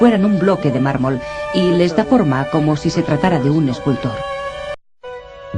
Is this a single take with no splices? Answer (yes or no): no